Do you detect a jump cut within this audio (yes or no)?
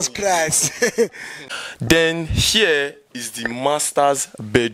yes